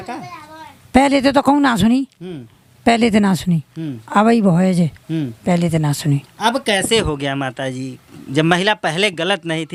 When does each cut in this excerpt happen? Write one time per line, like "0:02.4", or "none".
none